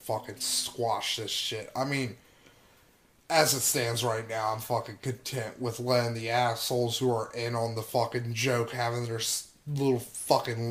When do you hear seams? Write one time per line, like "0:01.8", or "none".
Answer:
0:09.7